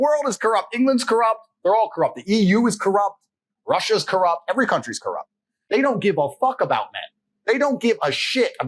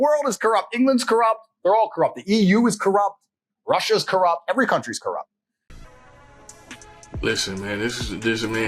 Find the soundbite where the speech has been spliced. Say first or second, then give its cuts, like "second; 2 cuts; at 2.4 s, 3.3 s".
first; 1 cut; at 5.5 s